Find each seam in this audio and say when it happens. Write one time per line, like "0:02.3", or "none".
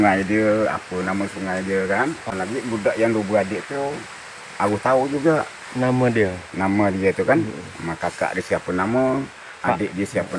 0:02.2